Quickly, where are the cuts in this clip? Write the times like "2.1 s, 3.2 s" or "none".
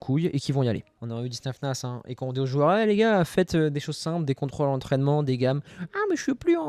0.9 s